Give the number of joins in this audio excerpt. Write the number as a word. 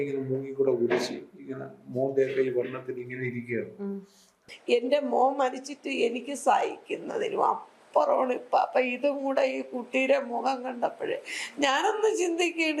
one